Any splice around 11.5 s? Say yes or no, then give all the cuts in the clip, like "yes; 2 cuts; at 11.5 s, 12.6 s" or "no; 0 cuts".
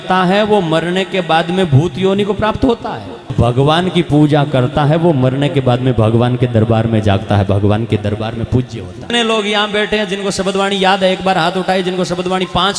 no; 2 cuts; at 3.3 s, 9.1 s